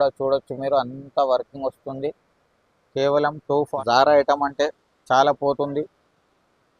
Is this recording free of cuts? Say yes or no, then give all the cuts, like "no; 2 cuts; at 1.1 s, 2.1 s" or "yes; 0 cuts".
no; 1 cut; at 3.7 s